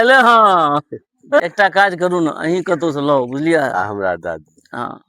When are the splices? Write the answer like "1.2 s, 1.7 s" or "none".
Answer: 1.4 s

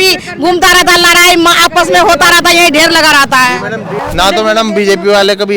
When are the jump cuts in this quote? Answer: 3.9 s

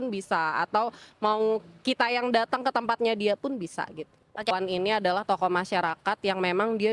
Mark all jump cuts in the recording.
4.5 s

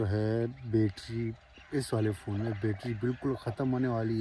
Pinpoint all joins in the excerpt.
none

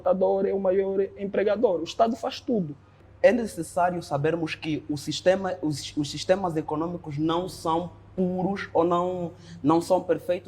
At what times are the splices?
3.0 s

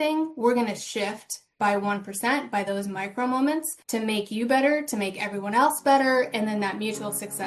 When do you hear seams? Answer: 3.8 s

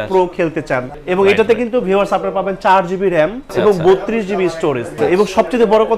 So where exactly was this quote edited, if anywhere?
1.0 s, 3.4 s, 5.0 s

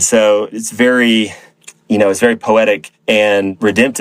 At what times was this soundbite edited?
none

